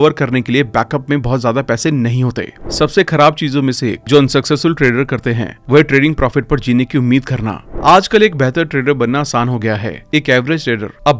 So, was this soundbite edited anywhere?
yes; 2 cuts; at 2.6 s, 7.6 s

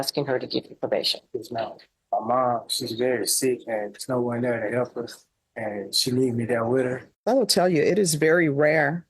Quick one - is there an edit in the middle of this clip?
yes; 2 cuts; at 1.9 s, 7.1 s

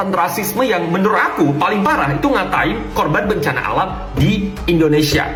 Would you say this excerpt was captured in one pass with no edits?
yes; 0 cuts

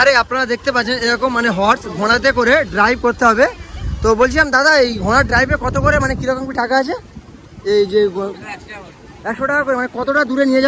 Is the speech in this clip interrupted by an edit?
no; 0 cuts

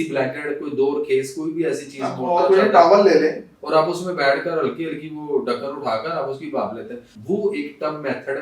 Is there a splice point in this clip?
yes; 2 cuts; at 3.5 s, 7.1 s

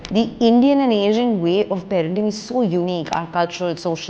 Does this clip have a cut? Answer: no; 0 cuts

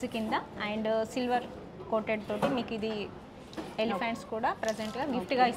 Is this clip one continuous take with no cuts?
yes; 0 cuts

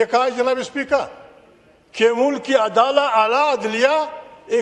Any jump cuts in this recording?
no; 0 cuts

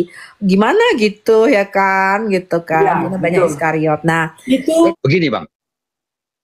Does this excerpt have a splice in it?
yes; 1 cut; at 4.9 s

